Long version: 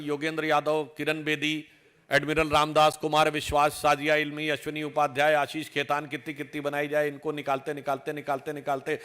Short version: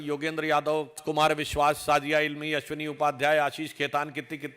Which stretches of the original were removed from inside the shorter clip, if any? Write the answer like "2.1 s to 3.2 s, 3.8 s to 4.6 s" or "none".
1.0 s to 3.0 s